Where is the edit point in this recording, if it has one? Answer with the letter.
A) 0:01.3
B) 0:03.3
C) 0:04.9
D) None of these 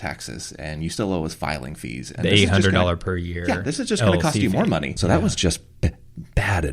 C